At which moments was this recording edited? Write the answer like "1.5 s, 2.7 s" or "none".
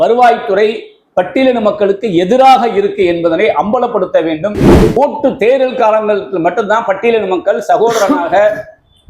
5.0 s